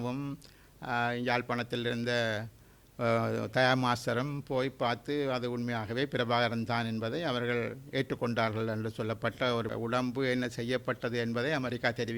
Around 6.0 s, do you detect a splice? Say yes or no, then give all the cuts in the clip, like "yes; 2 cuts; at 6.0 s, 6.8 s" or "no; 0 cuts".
no; 1 cut; at 9.7 s